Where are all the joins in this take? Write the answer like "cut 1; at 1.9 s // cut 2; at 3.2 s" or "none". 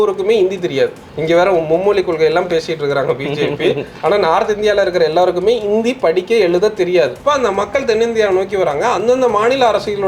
cut 1; at 7.2 s